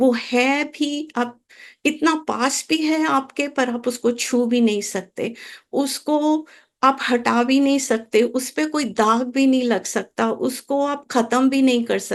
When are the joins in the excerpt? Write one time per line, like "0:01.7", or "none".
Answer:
none